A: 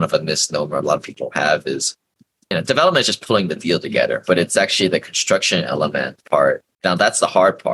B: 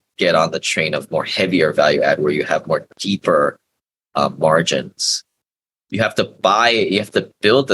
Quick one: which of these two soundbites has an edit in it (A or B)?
A